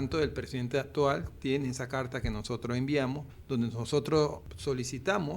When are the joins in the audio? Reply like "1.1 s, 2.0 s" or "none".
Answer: 3.3 s, 4.5 s